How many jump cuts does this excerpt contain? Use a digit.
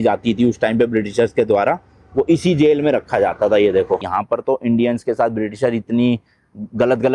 1